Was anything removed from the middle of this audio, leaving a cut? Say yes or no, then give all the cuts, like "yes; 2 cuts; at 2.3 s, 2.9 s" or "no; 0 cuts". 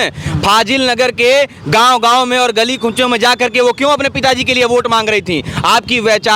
no; 0 cuts